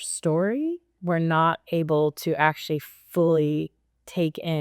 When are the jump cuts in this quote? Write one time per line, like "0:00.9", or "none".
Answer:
0:00.9